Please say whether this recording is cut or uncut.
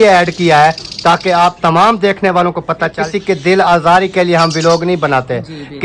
cut